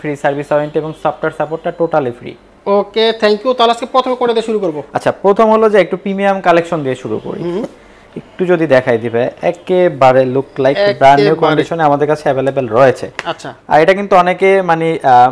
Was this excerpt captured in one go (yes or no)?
yes